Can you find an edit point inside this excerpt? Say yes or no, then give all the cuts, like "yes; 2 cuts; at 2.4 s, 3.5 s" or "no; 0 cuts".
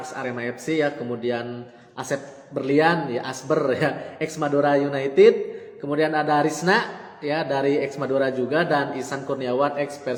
no; 0 cuts